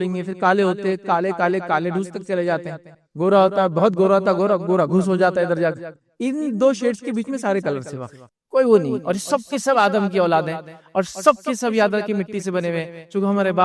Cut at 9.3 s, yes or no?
no